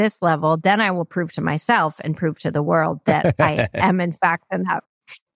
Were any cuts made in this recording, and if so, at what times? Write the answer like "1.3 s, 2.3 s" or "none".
none

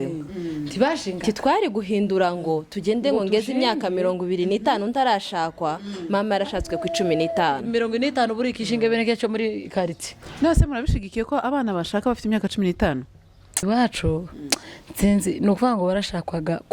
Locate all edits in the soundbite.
13.6 s

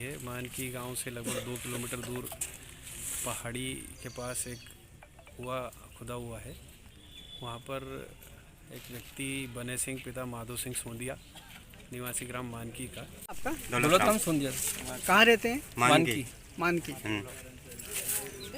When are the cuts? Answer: 13.2 s

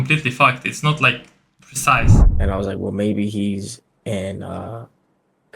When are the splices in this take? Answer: 2.2 s

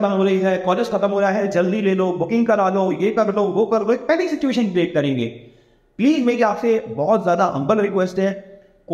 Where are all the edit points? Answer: none

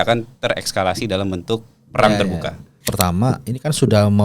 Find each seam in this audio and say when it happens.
2.9 s

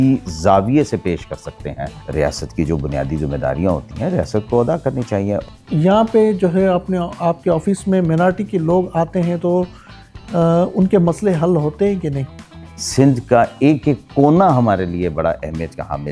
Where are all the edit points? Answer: 1.9 s, 5.4 s, 12.6 s

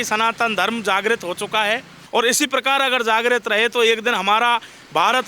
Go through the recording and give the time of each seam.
1.9 s

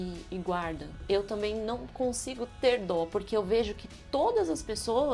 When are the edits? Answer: 1.0 s

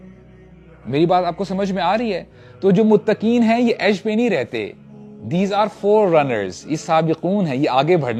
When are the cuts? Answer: none

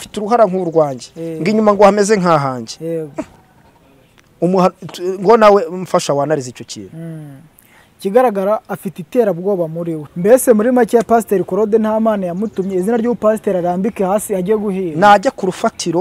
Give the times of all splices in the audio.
10.0 s

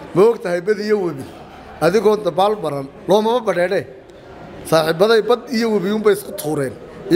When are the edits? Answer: none

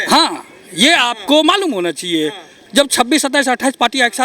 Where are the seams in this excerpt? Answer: 2.5 s

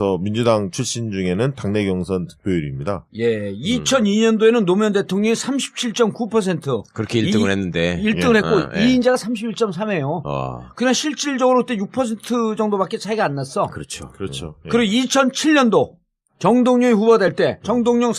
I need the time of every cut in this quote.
7.7 s

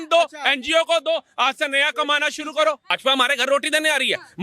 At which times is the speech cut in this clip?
3.0 s

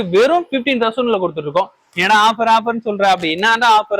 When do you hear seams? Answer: 1.9 s

